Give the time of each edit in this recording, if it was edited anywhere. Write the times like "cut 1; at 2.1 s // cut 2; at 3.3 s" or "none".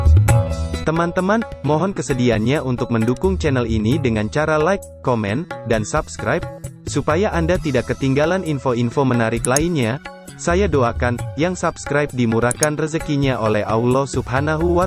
none